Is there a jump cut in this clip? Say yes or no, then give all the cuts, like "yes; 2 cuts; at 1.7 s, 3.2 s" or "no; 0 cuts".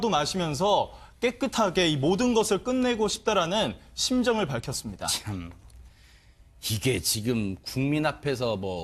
yes; 1 cut; at 2.9 s